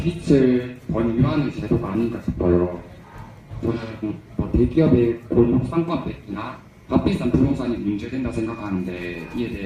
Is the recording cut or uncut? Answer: uncut